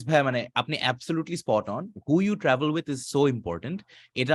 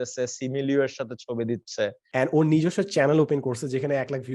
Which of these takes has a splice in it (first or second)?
second